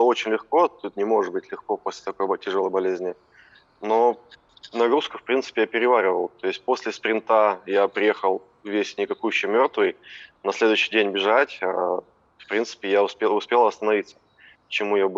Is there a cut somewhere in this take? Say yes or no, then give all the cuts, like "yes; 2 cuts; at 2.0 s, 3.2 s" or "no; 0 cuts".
no; 0 cuts